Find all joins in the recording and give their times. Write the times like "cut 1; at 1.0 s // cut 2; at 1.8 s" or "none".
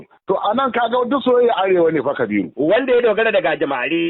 none